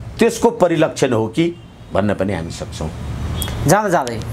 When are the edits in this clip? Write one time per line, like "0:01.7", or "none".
none